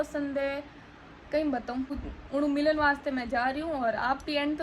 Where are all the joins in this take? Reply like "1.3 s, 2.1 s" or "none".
2.0 s

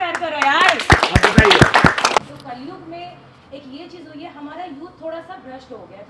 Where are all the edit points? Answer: 2.2 s

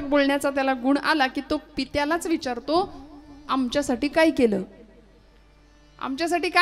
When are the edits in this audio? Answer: none

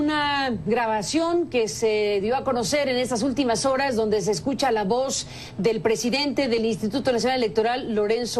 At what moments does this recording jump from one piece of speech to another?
1.9 s

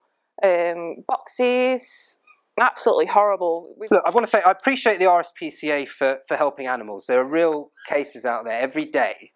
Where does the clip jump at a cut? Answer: 3.7 s

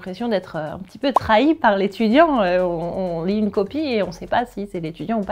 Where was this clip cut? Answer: none

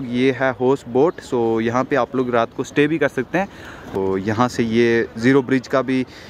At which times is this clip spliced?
3.9 s

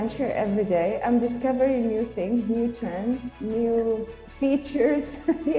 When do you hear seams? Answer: none

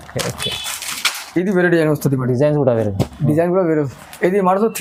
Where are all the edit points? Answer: none

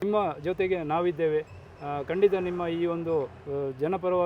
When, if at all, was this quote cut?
none

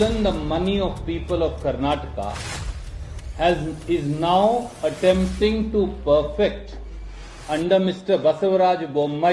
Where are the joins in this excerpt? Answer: none

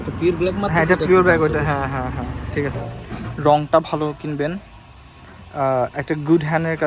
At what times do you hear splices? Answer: 2.8 s

